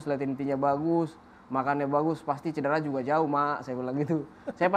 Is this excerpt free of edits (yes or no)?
yes